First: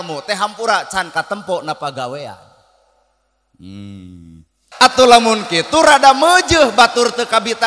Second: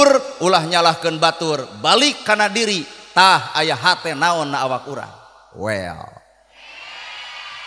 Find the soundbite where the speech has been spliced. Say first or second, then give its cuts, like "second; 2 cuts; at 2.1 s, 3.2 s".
first; 1 cut; at 4.7 s